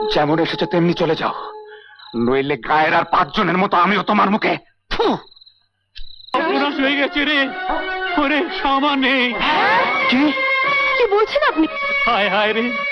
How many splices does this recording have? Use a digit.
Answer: 1